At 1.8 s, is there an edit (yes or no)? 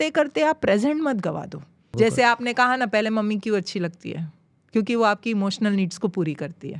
yes